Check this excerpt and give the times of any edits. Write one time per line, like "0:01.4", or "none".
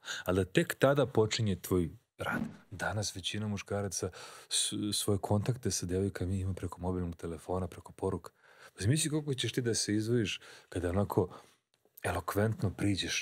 0:02.4